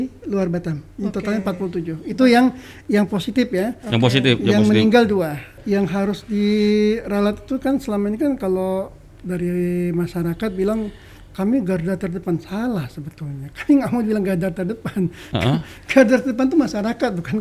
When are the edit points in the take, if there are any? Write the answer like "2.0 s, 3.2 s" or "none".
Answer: 5.6 s